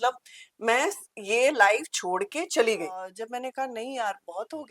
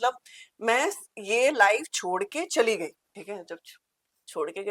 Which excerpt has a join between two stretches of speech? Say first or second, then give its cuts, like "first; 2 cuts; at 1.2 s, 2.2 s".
first; 1 cut; at 3.1 s